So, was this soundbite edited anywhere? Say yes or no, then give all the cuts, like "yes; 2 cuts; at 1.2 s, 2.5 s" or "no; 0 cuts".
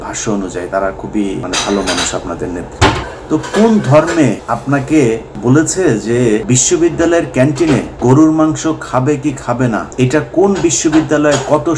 yes; 7 cuts; at 1.4 s, 3.0 s, 4.4 s, 5.3 s, 6.4 s, 7.9 s, 9.9 s